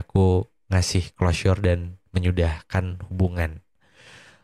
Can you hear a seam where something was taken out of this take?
no; 0 cuts

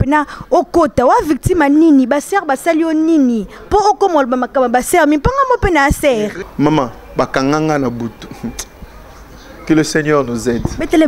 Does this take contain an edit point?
yes; 1 cut; at 6.4 s

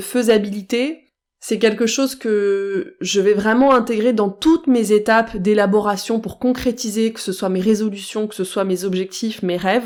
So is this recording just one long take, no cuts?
yes; 0 cuts

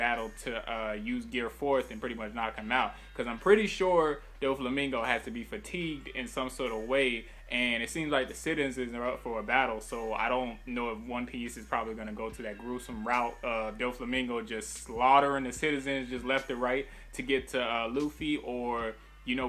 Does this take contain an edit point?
yes; 1 cut; at 16.5 s

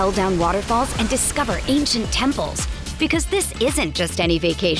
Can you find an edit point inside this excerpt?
no; 0 cuts

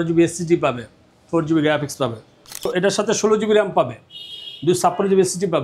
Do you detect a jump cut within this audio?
yes; 1 cut; at 2.7 s

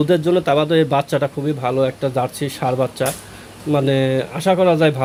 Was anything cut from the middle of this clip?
no; 0 cuts

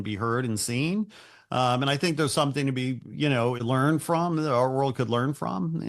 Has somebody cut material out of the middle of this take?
yes; 1 cut; at 3.6 s

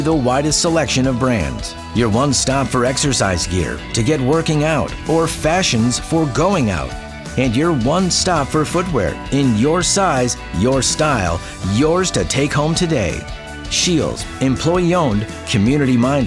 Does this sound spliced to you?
no; 0 cuts

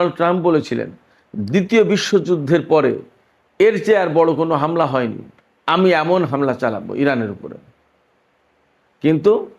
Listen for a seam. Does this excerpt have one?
no; 0 cuts

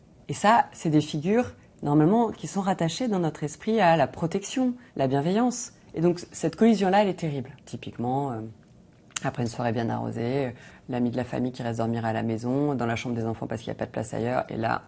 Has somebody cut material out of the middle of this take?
yes; 1 cut; at 7.5 s

